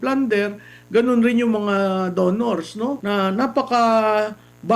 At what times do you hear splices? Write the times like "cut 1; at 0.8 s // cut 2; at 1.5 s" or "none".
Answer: cut 1; at 3.0 s